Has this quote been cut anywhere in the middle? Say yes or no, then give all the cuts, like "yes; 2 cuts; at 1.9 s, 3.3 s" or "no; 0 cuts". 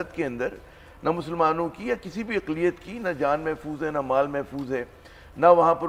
no; 0 cuts